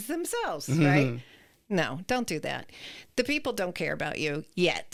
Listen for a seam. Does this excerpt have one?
no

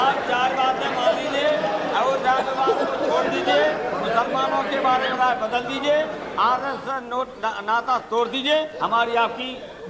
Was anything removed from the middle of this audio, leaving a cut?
no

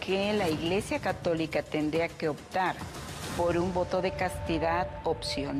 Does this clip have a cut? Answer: no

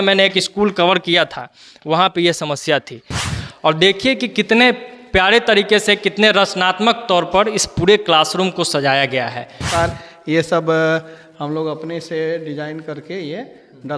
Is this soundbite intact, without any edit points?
no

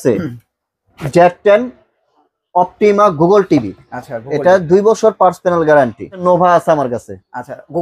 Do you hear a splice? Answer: yes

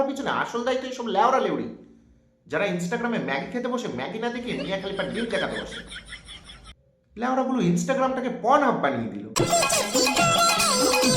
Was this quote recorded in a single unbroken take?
no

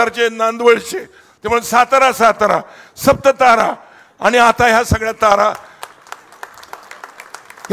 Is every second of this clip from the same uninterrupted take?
yes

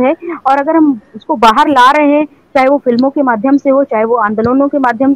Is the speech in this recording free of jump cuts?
yes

